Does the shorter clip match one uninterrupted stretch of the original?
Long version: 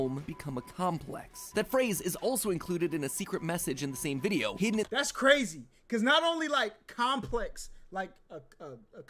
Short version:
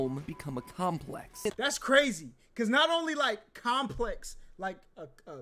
no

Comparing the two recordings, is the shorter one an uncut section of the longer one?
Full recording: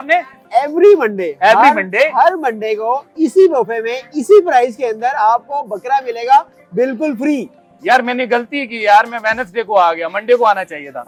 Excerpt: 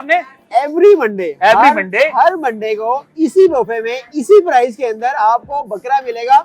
yes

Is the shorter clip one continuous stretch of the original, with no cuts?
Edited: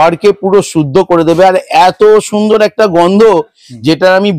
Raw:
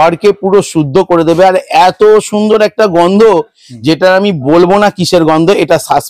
yes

